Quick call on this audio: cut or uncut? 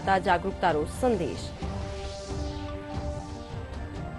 cut